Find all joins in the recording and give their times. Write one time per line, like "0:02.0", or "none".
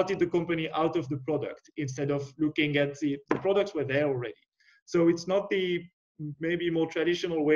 none